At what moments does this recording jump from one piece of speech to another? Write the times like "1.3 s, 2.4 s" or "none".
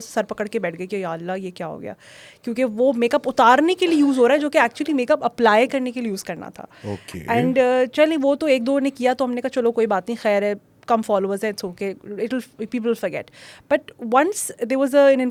none

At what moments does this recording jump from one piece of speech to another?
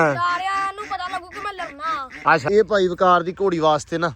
2.4 s

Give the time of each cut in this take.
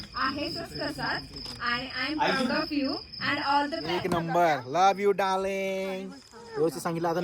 3.8 s

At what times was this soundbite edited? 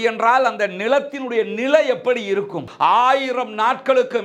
2.7 s

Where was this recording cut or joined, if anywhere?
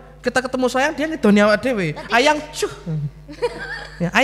none

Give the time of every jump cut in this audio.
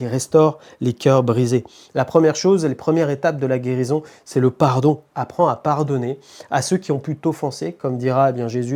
none

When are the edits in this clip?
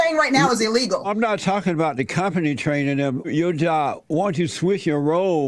1.1 s, 3.3 s

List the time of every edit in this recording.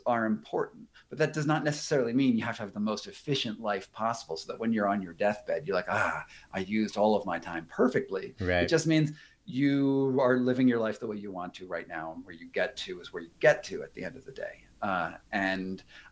none

